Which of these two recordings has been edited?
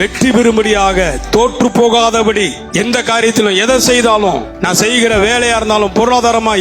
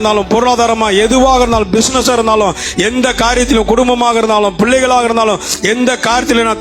first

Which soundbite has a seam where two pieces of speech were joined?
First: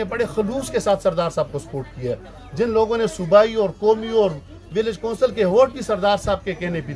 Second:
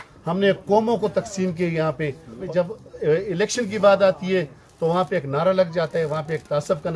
second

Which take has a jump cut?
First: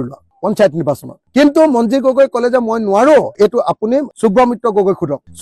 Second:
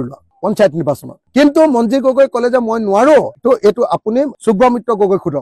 first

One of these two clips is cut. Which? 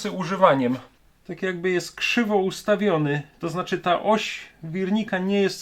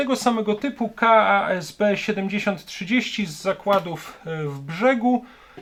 first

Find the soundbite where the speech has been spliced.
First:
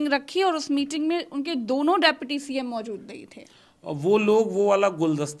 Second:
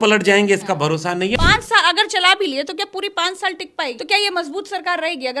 second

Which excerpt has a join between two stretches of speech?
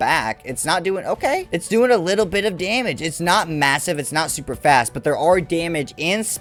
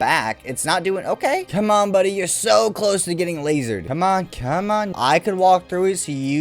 second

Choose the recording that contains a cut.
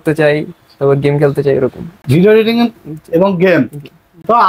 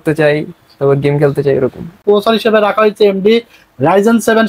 second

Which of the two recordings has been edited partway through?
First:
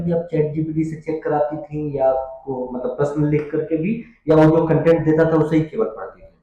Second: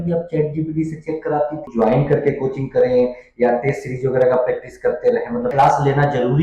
second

